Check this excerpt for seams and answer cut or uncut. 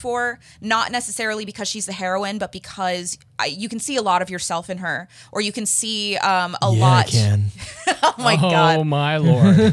uncut